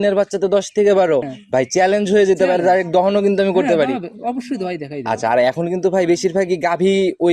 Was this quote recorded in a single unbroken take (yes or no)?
no